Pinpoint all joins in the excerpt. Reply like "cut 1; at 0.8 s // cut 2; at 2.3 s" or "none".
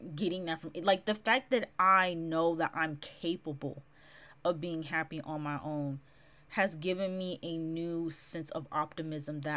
none